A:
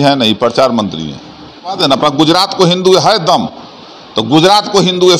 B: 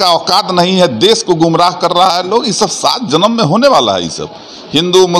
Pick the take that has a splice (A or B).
A